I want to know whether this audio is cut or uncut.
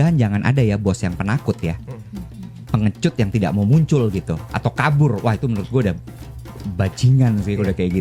uncut